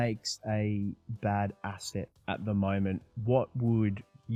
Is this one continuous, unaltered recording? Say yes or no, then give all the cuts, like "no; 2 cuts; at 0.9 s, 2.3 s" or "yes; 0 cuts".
yes; 0 cuts